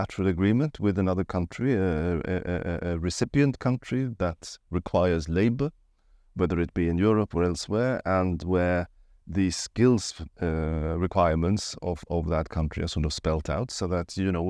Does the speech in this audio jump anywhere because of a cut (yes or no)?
no